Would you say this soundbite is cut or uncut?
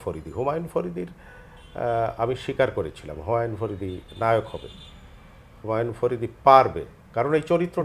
uncut